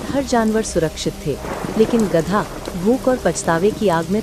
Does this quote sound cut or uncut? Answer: uncut